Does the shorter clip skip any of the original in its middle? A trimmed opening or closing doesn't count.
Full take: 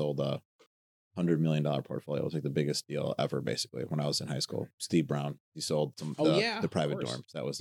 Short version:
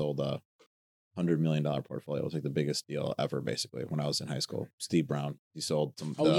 no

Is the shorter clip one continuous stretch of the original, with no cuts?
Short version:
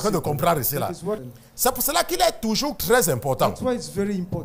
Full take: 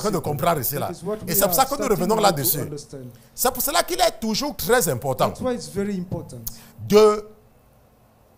no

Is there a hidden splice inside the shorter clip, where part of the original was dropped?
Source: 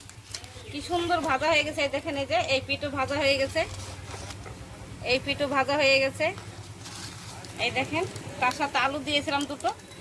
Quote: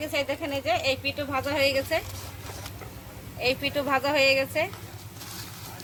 no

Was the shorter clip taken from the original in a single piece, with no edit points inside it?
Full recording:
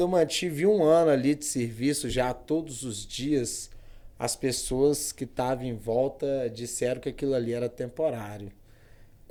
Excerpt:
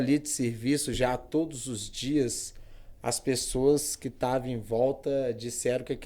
yes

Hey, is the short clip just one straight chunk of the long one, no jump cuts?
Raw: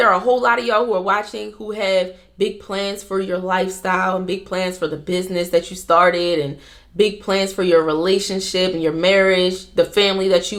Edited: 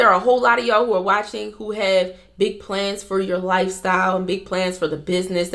yes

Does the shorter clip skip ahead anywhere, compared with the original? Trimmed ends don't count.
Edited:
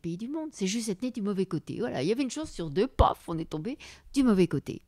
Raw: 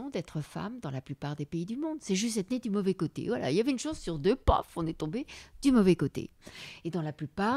no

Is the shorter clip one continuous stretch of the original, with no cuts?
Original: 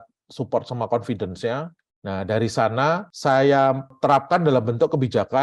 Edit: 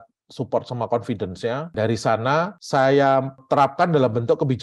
no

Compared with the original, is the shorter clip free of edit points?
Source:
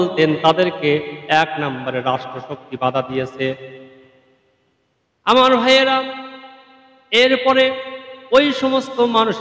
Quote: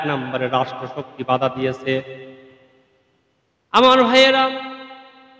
yes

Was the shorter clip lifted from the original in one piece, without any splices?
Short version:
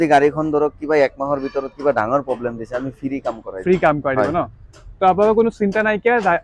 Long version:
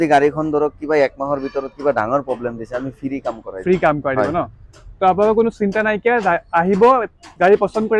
yes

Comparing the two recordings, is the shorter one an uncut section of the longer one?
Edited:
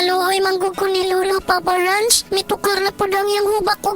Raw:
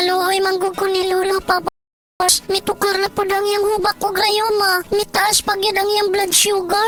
no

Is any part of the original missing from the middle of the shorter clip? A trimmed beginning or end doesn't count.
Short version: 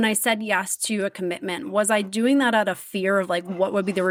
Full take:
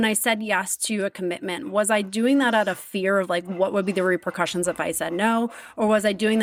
no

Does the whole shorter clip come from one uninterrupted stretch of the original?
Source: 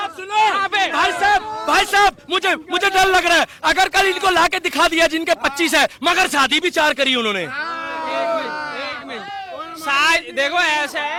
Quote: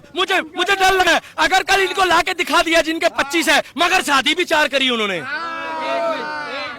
no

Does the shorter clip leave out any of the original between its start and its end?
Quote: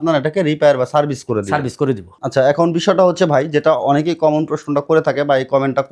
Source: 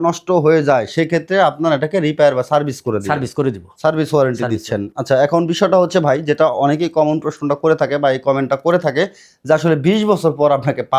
yes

